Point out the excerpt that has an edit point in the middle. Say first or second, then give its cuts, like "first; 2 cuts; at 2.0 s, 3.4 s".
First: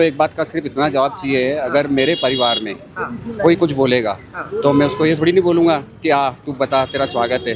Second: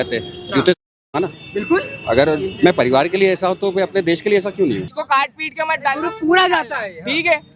second; 1 cut; at 4.9 s